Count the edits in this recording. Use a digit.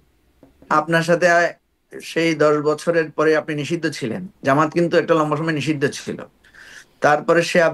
0